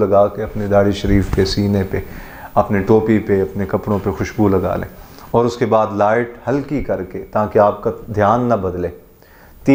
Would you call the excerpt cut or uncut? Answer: uncut